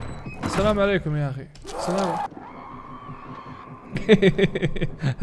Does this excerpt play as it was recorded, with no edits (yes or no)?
no